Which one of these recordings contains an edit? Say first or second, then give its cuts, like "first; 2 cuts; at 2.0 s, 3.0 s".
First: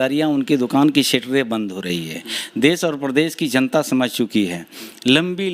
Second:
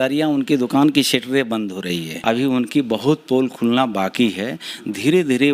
second; 1 cut; at 2.1 s